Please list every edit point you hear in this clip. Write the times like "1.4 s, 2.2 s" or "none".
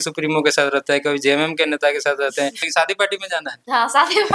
2.6 s